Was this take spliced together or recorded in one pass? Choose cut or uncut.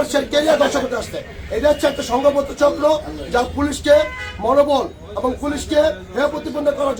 uncut